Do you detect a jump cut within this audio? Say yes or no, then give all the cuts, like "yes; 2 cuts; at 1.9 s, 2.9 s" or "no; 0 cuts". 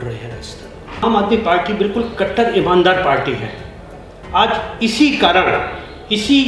yes; 1 cut; at 1.0 s